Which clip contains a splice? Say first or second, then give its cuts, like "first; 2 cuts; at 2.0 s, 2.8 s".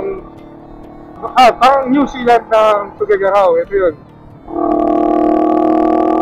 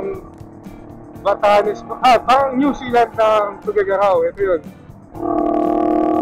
first; 1 cut; at 1.1 s